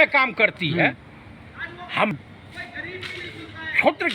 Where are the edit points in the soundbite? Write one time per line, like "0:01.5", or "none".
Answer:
0:02.1